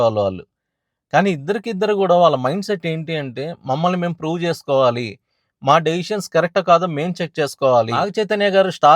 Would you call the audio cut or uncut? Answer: cut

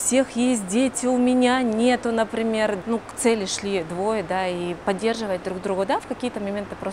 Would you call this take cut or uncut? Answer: cut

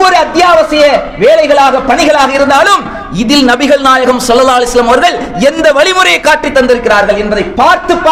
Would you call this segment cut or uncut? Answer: uncut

